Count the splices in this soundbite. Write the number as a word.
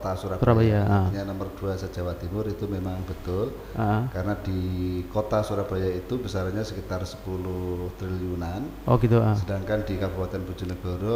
zero